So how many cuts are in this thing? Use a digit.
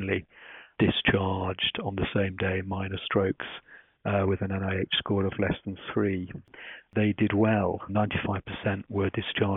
2